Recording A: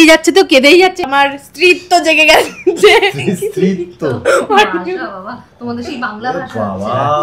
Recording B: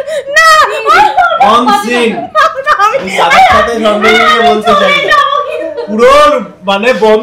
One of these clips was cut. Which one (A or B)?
A